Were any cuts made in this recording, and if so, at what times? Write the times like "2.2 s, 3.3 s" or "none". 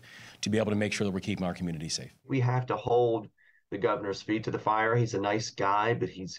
2.2 s